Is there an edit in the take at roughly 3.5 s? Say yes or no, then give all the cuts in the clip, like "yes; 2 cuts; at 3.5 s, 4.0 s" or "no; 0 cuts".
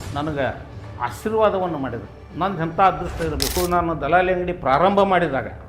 yes; 1 cut; at 3.5 s